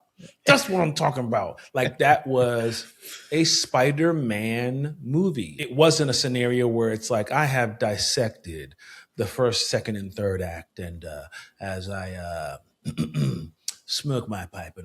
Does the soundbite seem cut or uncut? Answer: cut